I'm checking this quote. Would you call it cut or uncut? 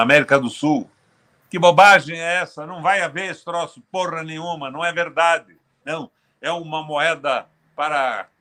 uncut